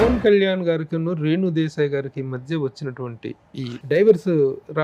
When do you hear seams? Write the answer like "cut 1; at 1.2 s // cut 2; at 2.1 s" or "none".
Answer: none